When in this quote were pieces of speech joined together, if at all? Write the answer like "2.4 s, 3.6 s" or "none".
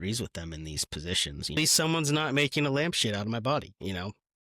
1.6 s